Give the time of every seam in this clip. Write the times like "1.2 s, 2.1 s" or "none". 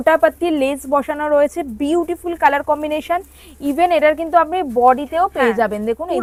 none

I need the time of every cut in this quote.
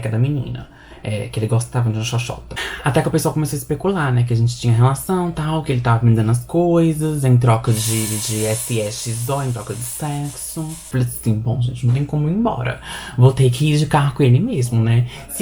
2.7 s, 10.8 s

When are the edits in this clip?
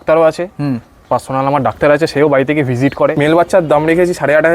3.1 s

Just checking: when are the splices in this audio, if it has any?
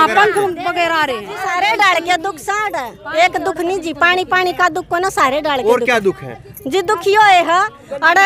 1.5 s

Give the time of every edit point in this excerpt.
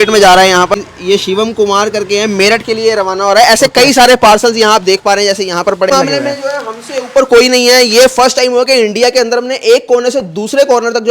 0.7 s, 5.9 s

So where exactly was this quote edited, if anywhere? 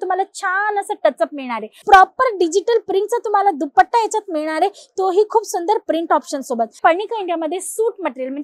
1.7 s, 6.8 s

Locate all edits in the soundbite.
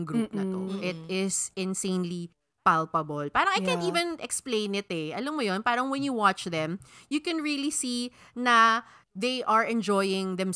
none

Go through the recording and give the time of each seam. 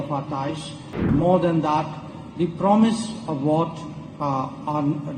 1.1 s

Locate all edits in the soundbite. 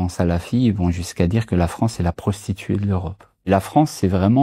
3.5 s

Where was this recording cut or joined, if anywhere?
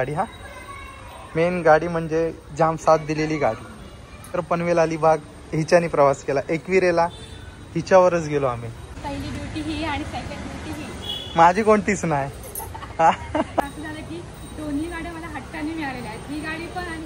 4.4 s, 9.0 s, 13.6 s

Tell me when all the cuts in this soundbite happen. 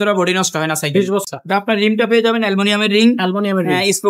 1.2 s

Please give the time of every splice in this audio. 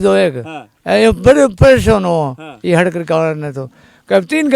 none

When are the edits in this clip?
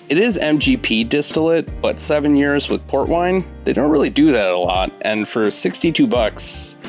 none

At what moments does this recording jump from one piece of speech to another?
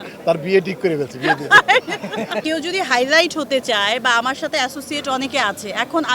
2.4 s

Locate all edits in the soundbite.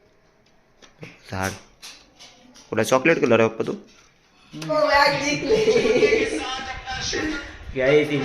4.7 s

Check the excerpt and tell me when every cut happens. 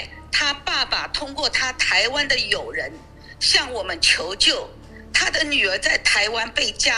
none

